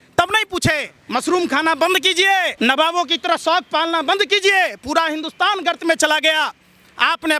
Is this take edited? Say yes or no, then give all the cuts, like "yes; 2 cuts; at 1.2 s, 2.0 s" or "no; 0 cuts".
yes; 2 cuts; at 0.9 s, 2.5 s